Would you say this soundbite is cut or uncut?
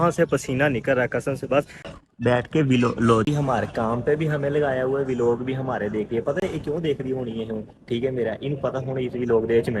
cut